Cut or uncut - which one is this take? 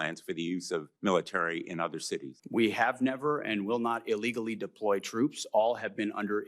cut